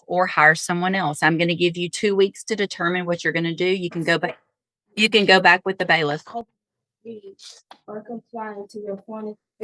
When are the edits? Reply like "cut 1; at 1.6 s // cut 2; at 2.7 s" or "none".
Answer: none